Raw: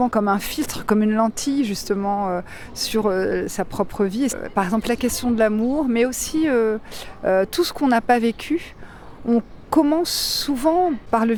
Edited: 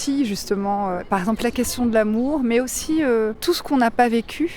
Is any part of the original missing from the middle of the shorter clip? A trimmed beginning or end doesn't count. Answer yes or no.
yes